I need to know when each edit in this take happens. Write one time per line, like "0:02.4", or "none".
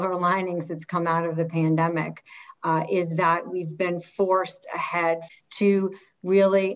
0:05.2